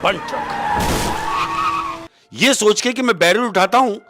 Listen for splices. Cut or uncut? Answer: cut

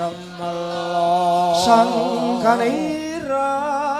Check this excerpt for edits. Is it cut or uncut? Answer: uncut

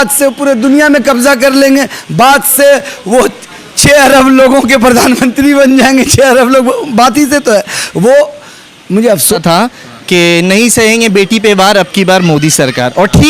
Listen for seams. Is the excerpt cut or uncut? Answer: cut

